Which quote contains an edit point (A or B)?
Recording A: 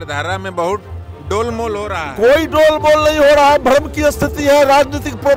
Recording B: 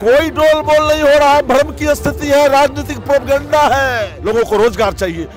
B